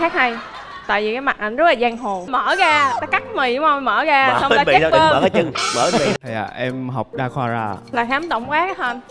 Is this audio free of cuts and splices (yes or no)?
no